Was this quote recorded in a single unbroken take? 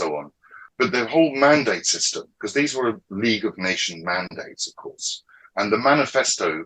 yes; 0 cuts

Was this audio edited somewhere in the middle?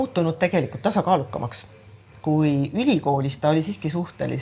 yes; 1 cut; at 2.1 s

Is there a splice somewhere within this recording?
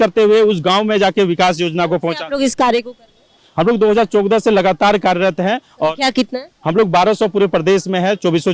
no; 0 cuts

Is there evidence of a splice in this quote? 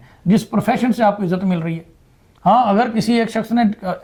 no; 0 cuts

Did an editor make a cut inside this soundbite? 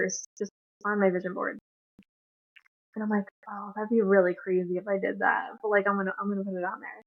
no; 0 cuts

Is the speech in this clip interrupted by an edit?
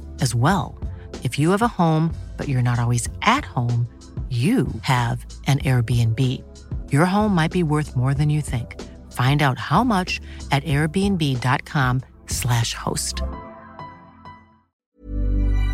yes; 1 cut; at 14.8 s

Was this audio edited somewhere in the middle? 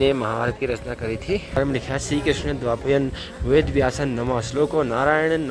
yes; 1 cut; at 1.6 s

